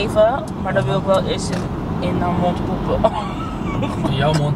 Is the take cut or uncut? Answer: uncut